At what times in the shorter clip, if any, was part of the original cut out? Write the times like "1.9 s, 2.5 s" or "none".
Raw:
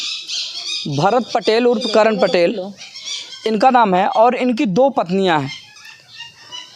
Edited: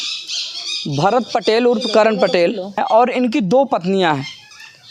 2.8 s